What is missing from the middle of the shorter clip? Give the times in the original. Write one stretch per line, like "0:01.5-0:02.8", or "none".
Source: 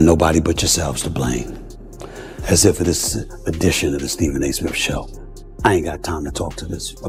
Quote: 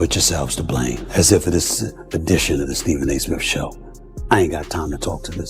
0:01.5-0:02.4